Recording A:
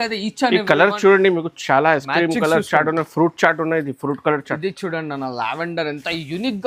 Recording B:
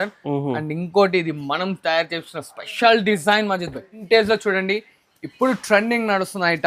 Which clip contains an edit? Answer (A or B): B